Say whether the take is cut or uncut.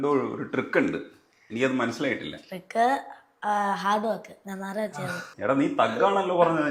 uncut